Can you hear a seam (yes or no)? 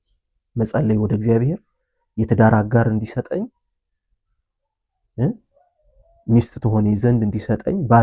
no